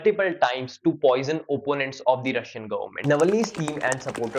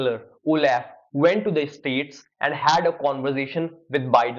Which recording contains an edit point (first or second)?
first